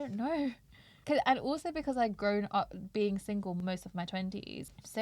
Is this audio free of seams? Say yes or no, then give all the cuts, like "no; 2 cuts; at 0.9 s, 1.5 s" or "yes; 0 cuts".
yes; 0 cuts